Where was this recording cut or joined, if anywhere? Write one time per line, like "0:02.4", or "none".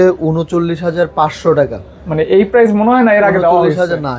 none